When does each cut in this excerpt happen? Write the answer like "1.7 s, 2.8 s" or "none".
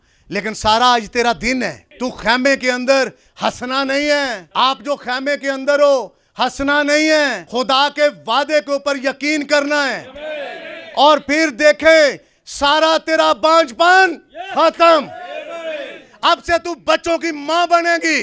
1.8 s, 4.4 s, 7.4 s